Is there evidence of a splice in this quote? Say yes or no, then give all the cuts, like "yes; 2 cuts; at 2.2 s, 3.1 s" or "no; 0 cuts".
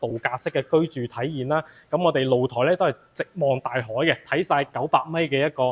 no; 0 cuts